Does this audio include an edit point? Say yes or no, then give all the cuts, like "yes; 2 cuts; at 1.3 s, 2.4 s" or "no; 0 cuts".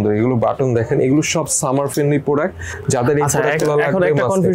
no; 0 cuts